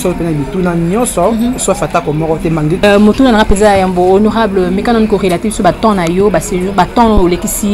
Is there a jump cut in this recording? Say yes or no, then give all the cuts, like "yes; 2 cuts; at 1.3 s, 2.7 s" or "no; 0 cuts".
yes; 1 cut; at 2.8 s